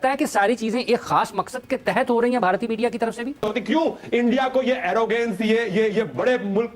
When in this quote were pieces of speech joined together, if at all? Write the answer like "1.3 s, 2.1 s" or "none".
3.4 s